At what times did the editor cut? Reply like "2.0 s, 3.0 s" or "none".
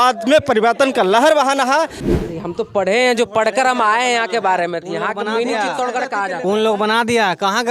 2.1 s